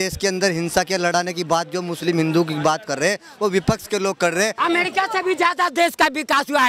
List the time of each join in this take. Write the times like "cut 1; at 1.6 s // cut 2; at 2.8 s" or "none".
cut 1; at 4.6 s